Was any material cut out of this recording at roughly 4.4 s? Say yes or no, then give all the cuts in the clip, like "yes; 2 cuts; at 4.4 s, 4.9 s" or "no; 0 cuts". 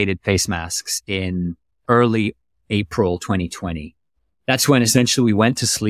no; 1 cut; at 1.8 s